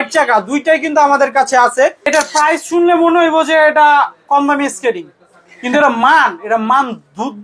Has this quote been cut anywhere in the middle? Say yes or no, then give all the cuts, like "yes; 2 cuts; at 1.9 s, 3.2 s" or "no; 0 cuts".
yes; 1 cut; at 2.1 s